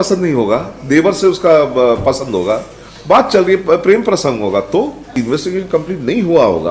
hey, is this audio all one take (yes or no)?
no